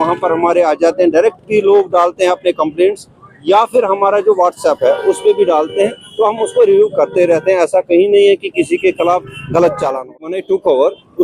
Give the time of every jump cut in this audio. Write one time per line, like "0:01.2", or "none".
0:10.1